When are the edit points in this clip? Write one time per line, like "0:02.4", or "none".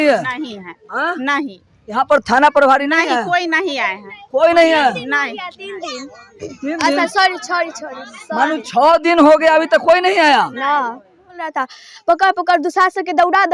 0:11.4